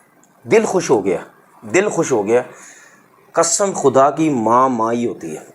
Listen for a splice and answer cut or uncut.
uncut